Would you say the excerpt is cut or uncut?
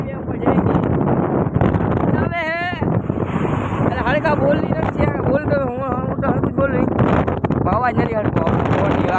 uncut